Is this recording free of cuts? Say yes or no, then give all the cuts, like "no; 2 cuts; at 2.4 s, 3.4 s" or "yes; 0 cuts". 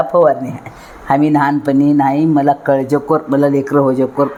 yes; 0 cuts